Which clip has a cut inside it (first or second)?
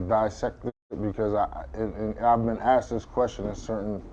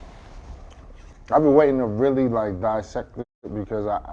second